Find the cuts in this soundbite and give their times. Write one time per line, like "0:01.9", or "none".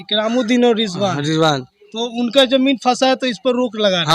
none